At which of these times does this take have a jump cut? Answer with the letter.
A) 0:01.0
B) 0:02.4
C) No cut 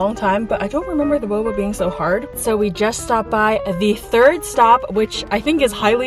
B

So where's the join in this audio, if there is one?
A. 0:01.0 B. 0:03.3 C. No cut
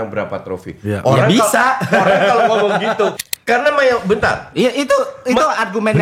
B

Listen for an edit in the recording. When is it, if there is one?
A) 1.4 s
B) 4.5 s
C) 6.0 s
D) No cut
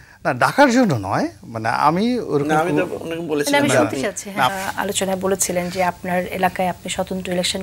B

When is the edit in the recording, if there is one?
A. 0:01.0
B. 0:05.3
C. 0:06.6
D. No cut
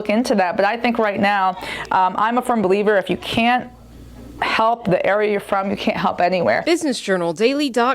C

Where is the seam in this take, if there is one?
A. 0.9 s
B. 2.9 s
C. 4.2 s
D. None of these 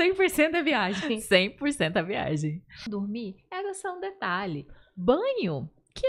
B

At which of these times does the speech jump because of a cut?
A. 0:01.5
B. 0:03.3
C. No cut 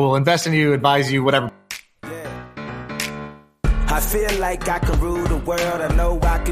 A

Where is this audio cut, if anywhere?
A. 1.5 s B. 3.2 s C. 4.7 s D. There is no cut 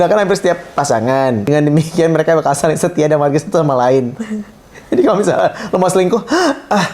A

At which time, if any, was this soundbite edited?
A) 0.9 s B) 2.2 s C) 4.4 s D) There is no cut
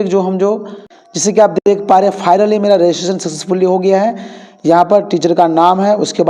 A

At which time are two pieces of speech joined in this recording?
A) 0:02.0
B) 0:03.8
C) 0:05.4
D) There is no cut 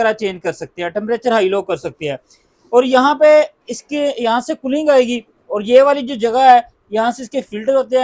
D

